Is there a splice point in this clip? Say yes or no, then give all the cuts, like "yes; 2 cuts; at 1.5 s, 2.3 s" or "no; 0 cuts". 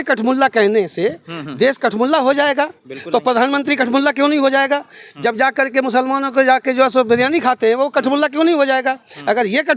no; 0 cuts